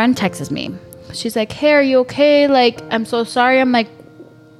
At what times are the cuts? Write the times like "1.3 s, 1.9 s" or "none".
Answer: none

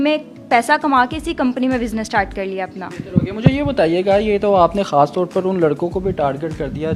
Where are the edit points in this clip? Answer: none

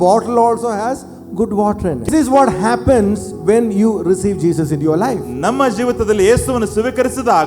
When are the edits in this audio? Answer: 2.1 s

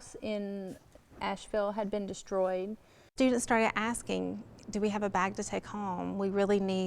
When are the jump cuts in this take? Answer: 3.1 s

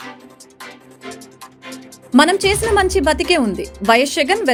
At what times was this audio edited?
none

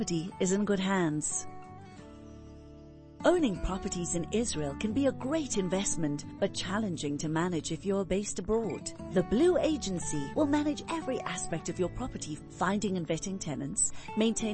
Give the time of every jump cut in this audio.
1.3 s, 3.1 s

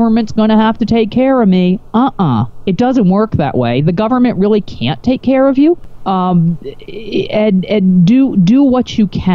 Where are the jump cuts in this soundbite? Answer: 5.9 s

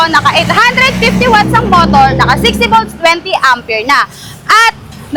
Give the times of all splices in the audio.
none

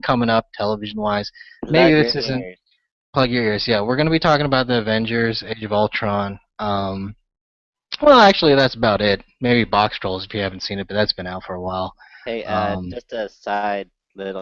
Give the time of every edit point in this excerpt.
11.5 s

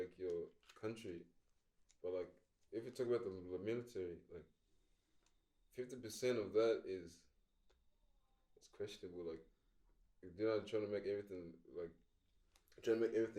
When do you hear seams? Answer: none

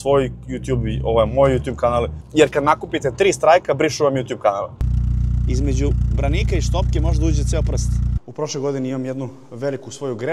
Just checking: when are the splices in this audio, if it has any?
2.2 s, 4.8 s, 8.1 s

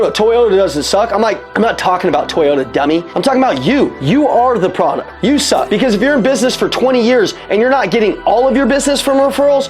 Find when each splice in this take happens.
1.4 s, 3.1 s, 4.0 s, 5.5 s

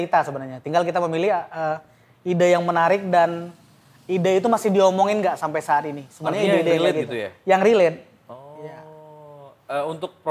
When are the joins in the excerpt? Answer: none

